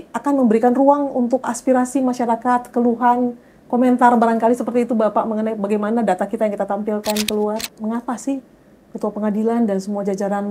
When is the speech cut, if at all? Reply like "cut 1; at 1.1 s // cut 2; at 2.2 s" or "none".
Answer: cut 1; at 1.5 s // cut 2; at 7.7 s